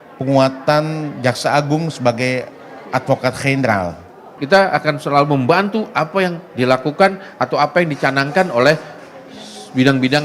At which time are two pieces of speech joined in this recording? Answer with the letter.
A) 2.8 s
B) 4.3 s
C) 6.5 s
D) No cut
B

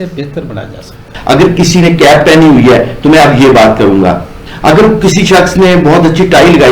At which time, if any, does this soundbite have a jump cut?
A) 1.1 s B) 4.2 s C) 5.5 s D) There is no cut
A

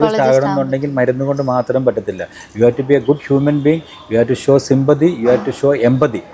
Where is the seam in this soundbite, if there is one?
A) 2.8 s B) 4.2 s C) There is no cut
C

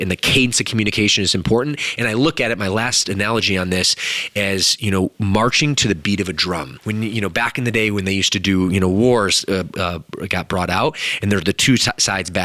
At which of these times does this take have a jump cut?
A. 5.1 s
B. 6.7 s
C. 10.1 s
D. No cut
B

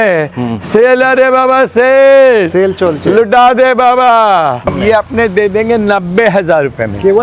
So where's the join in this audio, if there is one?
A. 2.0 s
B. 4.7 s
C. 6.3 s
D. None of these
B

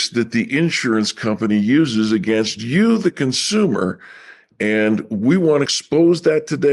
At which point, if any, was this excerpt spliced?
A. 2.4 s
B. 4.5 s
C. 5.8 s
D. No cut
C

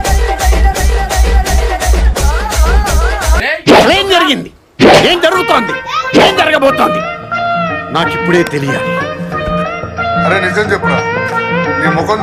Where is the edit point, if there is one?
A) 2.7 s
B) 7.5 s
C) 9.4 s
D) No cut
D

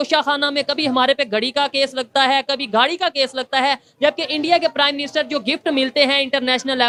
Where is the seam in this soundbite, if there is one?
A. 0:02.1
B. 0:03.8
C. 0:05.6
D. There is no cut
D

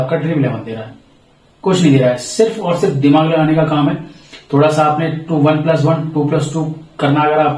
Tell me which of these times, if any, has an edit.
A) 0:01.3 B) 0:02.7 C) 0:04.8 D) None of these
D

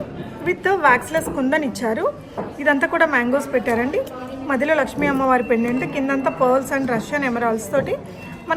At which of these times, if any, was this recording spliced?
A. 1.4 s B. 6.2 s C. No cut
C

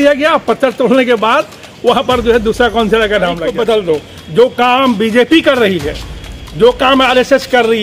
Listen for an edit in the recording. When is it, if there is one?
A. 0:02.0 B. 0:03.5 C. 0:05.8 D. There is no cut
B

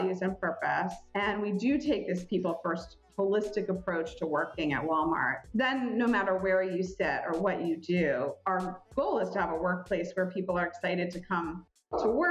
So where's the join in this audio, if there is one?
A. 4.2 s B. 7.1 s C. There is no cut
C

